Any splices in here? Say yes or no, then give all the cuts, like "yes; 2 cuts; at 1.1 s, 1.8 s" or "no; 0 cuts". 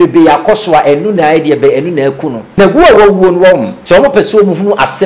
yes; 2 cuts; at 2.4 s, 3.7 s